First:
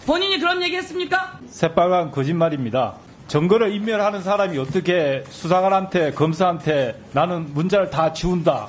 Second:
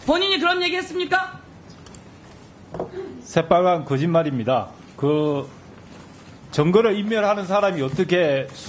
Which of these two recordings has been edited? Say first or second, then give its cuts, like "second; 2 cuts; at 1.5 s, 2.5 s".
first; 2 cuts; at 1.4 s, 3.1 s